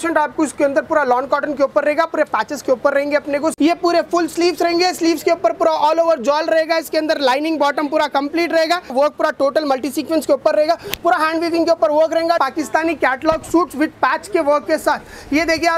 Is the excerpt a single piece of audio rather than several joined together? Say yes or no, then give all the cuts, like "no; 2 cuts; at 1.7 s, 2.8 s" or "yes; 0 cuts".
no; 3 cuts; at 3.5 s, 8.9 s, 12.4 s